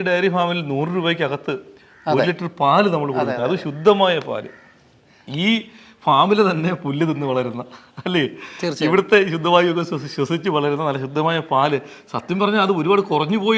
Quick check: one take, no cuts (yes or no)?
yes